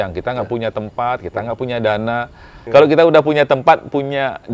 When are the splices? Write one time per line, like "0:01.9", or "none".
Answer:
0:02.5